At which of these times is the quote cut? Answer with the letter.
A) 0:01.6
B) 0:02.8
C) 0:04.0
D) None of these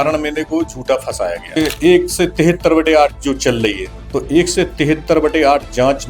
A